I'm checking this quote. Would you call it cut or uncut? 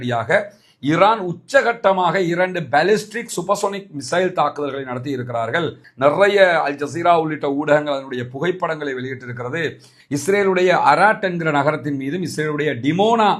cut